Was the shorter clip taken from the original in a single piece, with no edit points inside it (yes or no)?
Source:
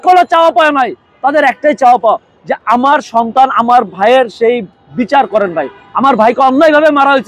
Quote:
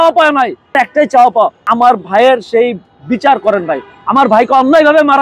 no